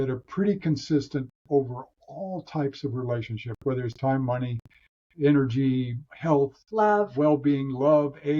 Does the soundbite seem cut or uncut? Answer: uncut